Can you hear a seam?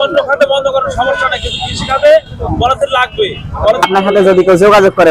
yes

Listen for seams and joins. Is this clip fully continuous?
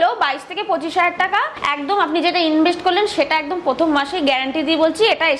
no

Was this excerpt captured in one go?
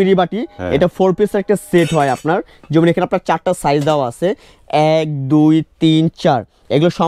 yes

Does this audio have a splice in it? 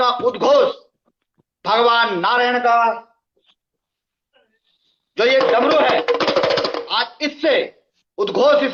no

